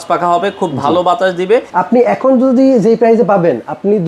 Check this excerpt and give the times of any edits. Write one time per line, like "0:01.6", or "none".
0:01.7